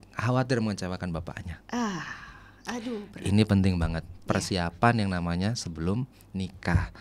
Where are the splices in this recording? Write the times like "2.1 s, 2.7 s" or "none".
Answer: none